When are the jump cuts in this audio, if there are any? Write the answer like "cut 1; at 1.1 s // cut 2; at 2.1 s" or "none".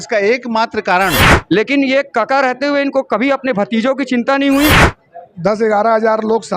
cut 1; at 1.3 s // cut 2; at 4.9 s

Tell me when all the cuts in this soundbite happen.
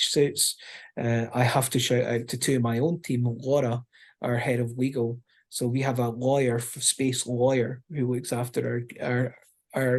none

